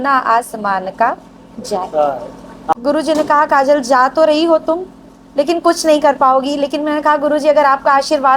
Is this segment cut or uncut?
cut